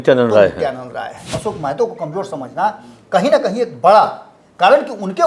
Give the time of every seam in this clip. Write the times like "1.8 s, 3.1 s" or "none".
1.2 s